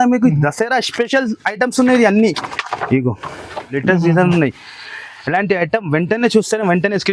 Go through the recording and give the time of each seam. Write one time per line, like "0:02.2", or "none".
0:03.8